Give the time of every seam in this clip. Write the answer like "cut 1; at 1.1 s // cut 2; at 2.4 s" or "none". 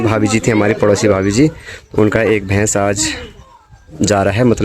none